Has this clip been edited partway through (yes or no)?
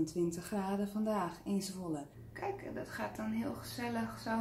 yes